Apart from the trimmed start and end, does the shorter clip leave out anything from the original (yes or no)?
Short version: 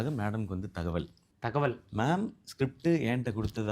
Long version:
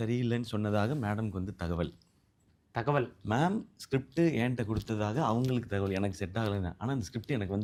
yes